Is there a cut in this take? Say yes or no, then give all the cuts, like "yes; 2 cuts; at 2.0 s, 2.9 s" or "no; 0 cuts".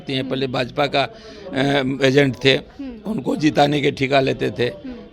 no; 0 cuts